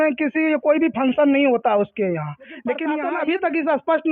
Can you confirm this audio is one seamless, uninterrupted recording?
no; 1 cut; at 2.9 s

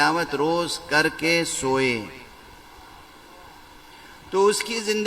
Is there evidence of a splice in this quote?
no; 0 cuts

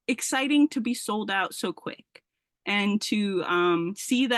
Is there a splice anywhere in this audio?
no; 0 cuts

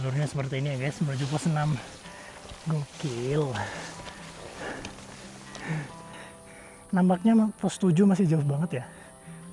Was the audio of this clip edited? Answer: yes; 1 cut; at 6.6 s

